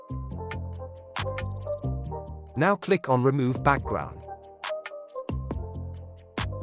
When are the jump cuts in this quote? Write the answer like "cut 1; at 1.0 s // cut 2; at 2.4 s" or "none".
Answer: cut 1; at 1.9 s // cut 2; at 3.8 s